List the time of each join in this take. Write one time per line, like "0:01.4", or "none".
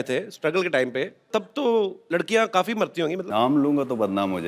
0:01.3
0:02.0
0:03.2